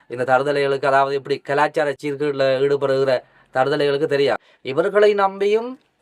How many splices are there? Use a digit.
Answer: 1